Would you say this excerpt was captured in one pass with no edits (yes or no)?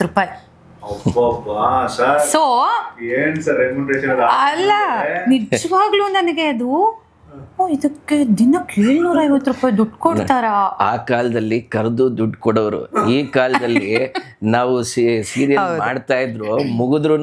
yes